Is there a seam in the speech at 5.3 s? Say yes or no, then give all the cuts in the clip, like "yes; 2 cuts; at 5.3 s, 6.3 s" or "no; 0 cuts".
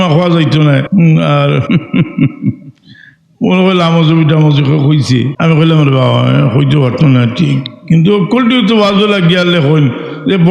yes; 3 cuts; at 0.9 s, 1.6 s, 5.3 s